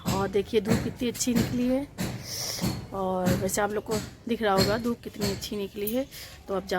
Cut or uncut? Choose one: uncut